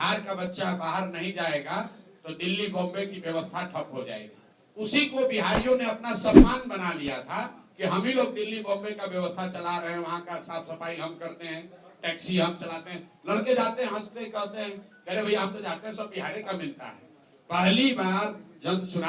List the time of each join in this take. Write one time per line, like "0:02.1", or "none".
none